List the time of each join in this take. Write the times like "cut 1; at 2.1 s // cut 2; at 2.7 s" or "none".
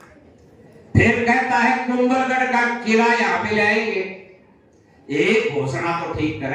none